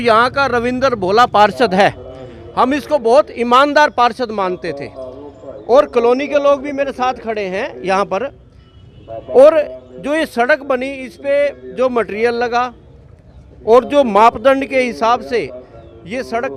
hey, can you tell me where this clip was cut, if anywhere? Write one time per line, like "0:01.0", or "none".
none